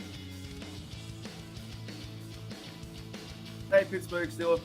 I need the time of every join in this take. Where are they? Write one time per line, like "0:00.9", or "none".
0:03.7